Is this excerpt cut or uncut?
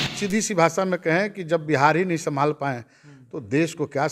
uncut